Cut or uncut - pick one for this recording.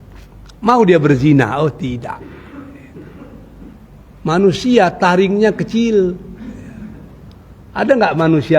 cut